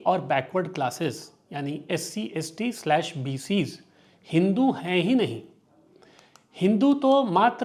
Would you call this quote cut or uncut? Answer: uncut